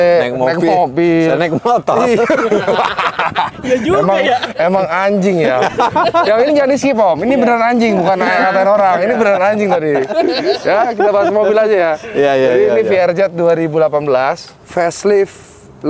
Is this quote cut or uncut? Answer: uncut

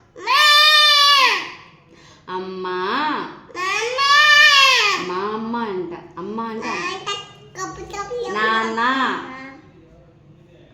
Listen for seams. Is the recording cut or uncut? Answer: uncut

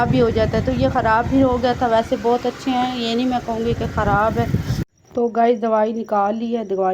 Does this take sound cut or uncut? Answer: cut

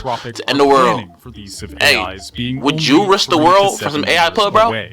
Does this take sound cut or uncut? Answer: cut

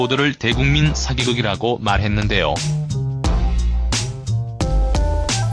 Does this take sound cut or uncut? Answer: cut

